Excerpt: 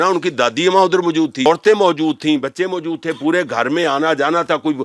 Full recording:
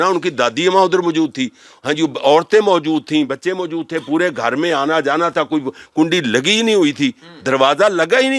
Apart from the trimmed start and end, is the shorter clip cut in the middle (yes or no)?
yes